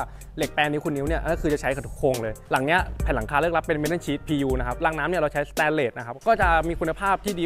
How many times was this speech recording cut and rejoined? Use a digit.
3